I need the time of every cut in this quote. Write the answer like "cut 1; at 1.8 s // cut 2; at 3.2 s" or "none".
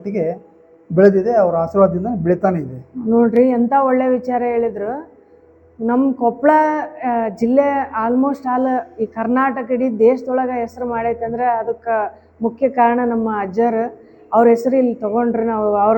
none